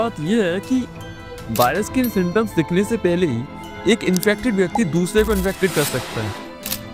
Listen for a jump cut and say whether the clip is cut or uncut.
uncut